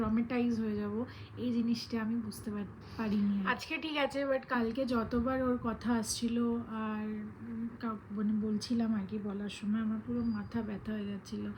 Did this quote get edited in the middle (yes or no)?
yes